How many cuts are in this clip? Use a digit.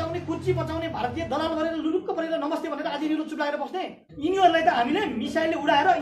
1